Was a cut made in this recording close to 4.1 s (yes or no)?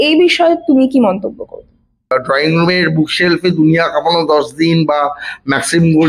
no